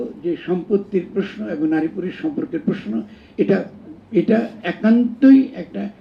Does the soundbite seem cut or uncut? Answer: uncut